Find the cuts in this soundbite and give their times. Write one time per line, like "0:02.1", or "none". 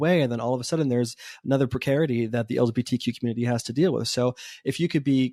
none